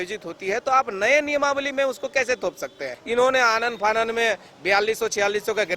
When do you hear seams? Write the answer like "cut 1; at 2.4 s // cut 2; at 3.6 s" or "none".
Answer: cut 1; at 2.9 s